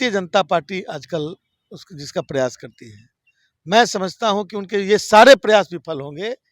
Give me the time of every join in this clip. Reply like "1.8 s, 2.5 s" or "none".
none